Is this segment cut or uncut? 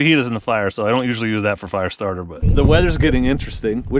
cut